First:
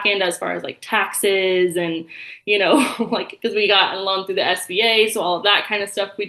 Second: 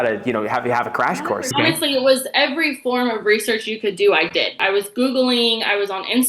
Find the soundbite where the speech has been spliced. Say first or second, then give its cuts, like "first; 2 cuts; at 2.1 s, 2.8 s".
second; 2 cuts; at 1.3 s, 4.6 s